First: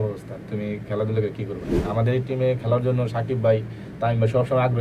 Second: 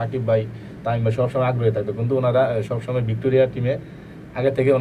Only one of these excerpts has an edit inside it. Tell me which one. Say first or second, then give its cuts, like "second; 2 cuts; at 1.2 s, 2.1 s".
first; 1 cut; at 1.7 s